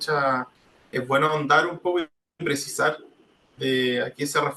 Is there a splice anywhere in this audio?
no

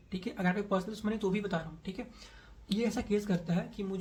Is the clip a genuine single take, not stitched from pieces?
yes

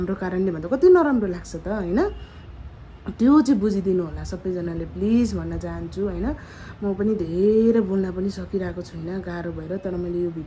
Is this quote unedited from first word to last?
yes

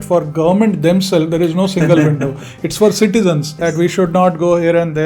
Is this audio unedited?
no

